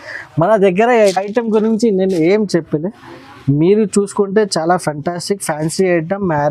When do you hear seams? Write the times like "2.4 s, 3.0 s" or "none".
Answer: 1.1 s